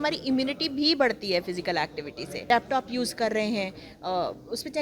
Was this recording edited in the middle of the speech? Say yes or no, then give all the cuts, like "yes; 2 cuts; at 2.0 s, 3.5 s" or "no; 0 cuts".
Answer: yes; 1 cut; at 2.4 s